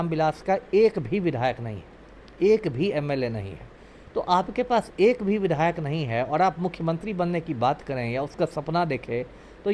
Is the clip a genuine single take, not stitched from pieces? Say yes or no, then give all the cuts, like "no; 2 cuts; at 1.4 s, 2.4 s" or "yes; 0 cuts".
yes; 0 cuts